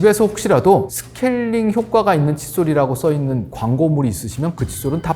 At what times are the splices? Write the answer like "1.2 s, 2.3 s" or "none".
1.0 s